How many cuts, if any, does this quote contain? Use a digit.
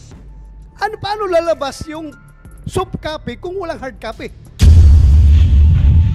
1